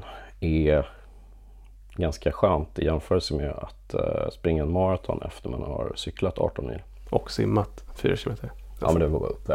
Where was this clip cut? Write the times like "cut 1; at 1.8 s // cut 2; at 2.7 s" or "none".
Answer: none